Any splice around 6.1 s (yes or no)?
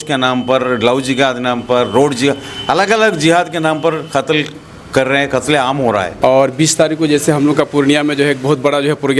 yes